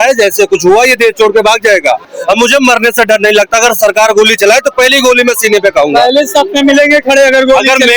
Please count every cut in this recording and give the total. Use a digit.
1